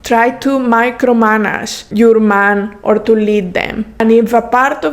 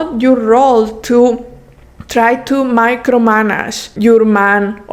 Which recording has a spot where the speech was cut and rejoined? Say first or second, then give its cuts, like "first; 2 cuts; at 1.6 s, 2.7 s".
first; 1 cut; at 3.9 s